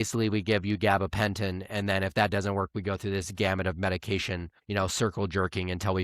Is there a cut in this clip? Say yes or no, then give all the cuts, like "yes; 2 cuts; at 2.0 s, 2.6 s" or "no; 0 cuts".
yes; 1 cut; at 4.5 s